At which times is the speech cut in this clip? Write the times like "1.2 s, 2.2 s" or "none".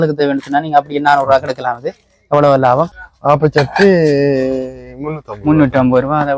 3.0 s